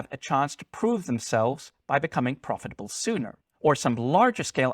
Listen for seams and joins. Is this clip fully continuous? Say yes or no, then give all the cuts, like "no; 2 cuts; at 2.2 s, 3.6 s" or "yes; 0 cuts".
no; 1 cut; at 3.4 s